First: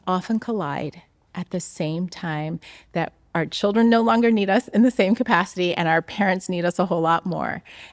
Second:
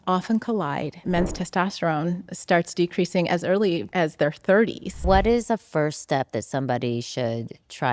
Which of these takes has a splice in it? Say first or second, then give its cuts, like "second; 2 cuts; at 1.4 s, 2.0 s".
second; 3 cuts; at 1.1 s, 3.9 s, 5.0 s